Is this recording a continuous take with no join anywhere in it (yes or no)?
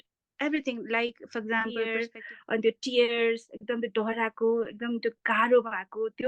no